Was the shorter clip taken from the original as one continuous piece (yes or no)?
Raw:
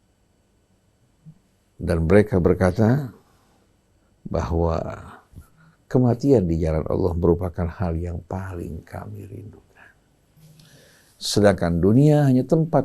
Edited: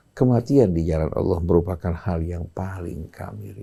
yes